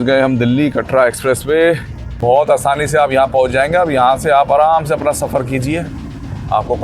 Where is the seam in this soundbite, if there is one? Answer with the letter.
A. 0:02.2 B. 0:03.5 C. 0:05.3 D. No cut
A